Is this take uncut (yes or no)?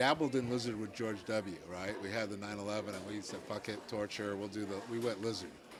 yes